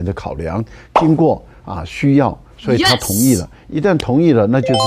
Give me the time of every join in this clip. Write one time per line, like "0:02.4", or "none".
none